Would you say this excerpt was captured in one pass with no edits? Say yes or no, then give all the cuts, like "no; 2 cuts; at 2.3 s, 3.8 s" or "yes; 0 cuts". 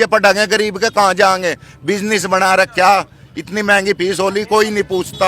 yes; 0 cuts